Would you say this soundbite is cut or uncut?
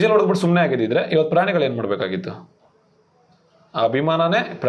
uncut